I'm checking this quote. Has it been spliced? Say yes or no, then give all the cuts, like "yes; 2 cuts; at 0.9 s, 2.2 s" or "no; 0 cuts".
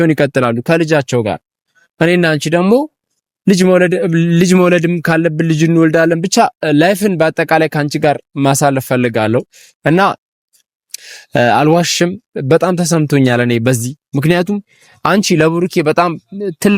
no; 0 cuts